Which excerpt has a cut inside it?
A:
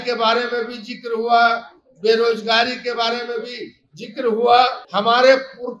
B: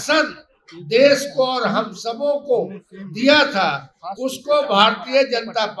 A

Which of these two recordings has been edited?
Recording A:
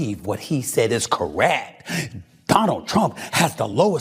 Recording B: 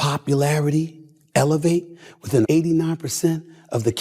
B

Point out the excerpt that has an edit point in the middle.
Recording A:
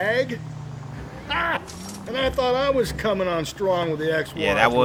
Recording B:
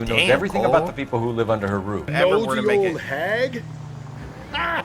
B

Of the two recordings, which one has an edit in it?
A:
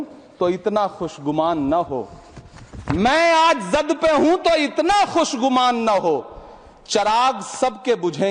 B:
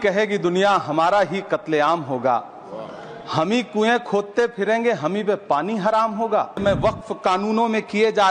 B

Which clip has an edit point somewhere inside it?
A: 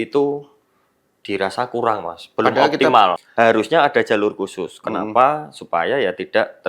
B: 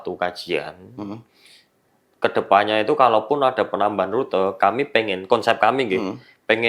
A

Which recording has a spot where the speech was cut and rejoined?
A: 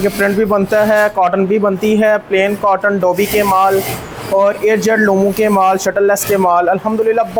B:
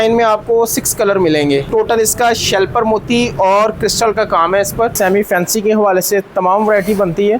B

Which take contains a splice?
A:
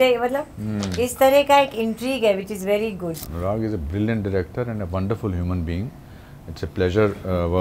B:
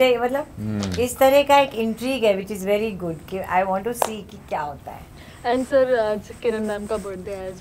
A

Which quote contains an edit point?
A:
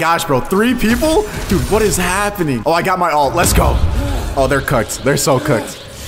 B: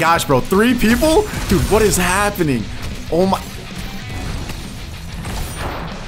A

